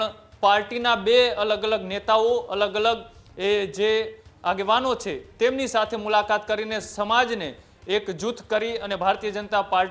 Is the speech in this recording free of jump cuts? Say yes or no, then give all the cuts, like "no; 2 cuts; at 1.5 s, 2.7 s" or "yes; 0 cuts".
yes; 0 cuts